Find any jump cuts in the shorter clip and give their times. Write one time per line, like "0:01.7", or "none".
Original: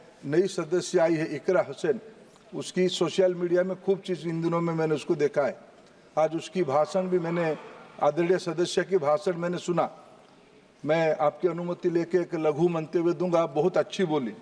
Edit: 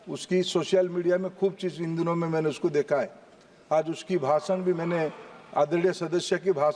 none